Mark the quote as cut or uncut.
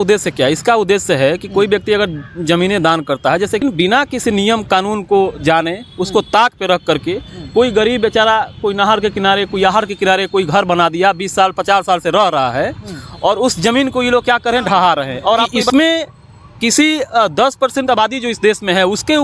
cut